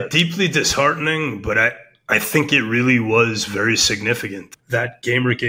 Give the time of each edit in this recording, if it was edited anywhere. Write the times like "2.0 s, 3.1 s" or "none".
4.4 s